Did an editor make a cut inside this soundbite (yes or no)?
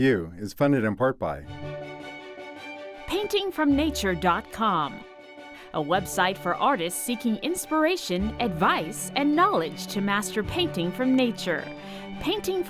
no